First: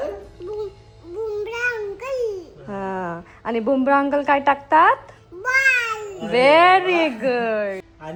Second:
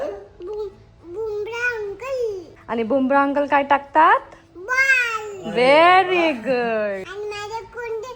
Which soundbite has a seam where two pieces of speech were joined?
second; 2 cuts; at 2.5 s, 7.1 s

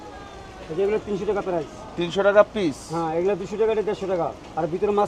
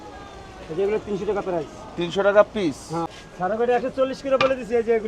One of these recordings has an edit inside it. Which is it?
second; 1 cut; at 3.1 s

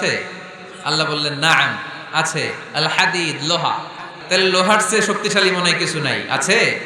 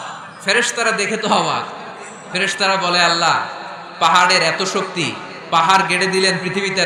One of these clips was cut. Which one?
first; 1 cut; at 4.1 s

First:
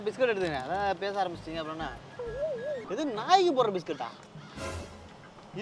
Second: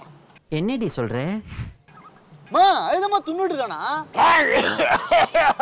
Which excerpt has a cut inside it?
first; 1 cut; at 2.8 s

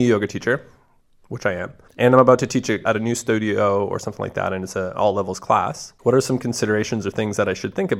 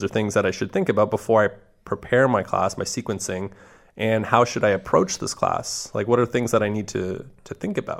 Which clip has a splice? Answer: first; 3 cuts; at 1.8 s, 2.8 s, 5.8 s

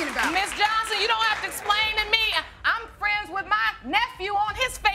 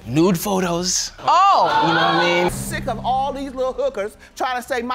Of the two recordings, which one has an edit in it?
second; 1 cut; at 2.6 s

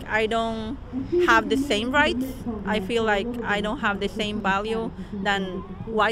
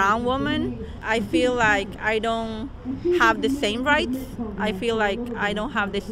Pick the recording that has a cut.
second; 1 cut; at 1.0 s

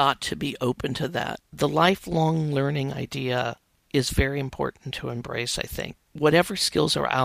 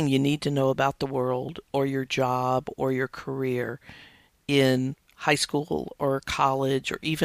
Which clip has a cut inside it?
first; 2 cuts; at 1.4 s, 6.0 s

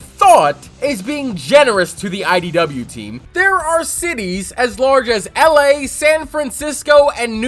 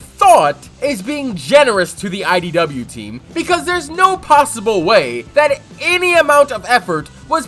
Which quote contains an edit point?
first; 1 cut; at 3.2 s

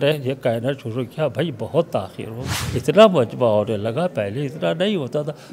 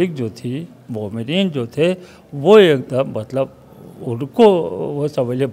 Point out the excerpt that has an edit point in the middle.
first; 1 cut; at 2.6 s

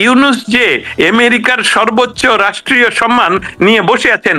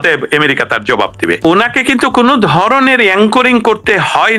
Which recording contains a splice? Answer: second; 1 cut; at 1.4 s

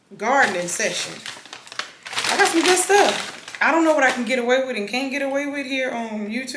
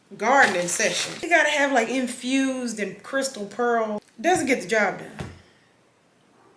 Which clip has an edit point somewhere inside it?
second; 2 cuts; at 1.1 s, 4.0 s

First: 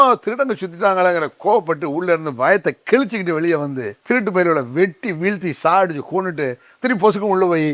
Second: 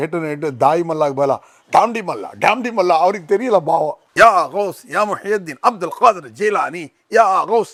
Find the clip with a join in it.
first; 1 cut; at 3.9 s

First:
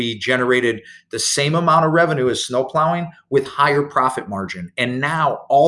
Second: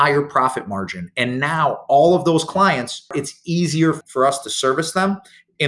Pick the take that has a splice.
second; 2 cuts; at 3.1 s, 4.0 s

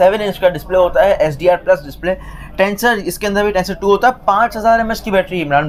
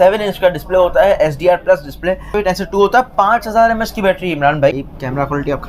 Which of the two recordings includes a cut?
second; 2 cuts; at 2.3 s, 4.7 s

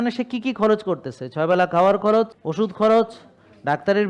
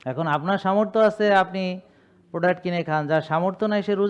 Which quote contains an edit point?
first; 1 cut; at 2.4 s

